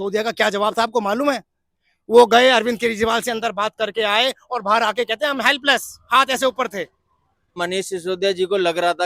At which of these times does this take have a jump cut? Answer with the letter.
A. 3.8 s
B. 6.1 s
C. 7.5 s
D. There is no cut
C